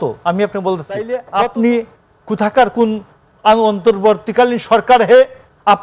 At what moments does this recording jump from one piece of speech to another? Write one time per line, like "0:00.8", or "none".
0:01.2